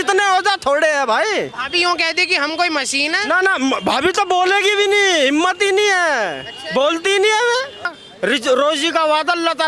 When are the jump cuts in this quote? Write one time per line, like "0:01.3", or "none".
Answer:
0:08.0